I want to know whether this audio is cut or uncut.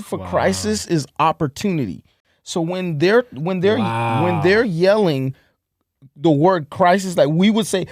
uncut